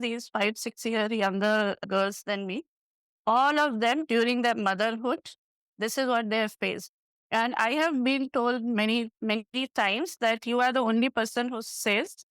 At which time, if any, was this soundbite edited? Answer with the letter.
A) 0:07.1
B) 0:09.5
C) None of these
A